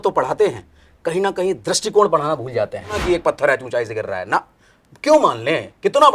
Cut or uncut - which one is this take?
cut